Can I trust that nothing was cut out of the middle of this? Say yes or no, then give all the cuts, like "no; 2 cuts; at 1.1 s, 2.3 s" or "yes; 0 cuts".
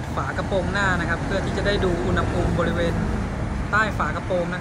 yes; 0 cuts